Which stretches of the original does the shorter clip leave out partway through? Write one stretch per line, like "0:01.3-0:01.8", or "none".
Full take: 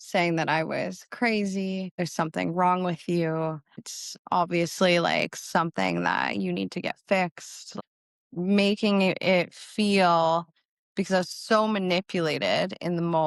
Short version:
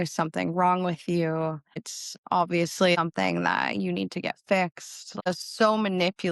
0:05.0-0:05.6
0:07.9-0:11.2